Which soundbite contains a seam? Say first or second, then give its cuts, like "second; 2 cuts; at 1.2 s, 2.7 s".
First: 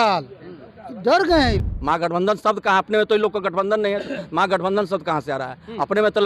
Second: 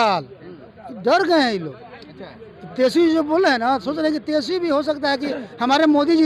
first; 1 cut; at 1.7 s